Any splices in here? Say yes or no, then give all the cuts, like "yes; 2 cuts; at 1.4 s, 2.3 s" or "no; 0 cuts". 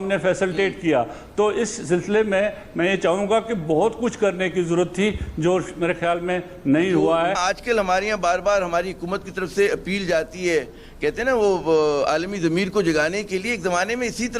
yes; 1 cut; at 7.4 s